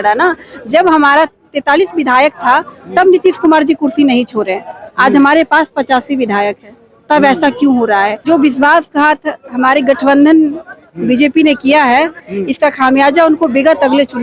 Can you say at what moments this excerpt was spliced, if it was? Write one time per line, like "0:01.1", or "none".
0:08.2